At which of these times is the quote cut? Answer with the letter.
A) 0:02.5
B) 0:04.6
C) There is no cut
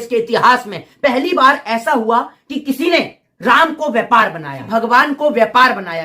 B